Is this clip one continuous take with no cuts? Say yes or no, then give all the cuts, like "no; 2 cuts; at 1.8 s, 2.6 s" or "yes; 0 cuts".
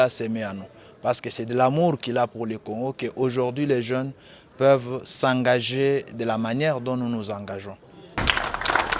yes; 0 cuts